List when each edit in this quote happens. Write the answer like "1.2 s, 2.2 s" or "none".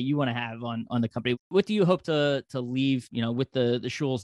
1.5 s, 3.1 s